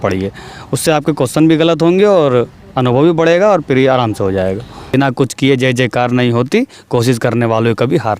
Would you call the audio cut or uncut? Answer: cut